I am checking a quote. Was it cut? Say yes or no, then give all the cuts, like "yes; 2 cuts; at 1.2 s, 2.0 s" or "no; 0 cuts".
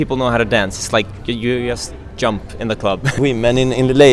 yes; 1 cut; at 3.2 s